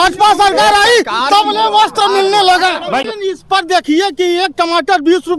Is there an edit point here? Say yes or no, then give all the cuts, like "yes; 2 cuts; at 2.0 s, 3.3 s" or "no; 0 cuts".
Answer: yes; 1 cut; at 3.0 s